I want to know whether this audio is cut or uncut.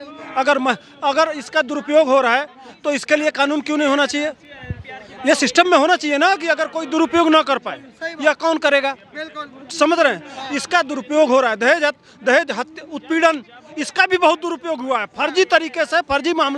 uncut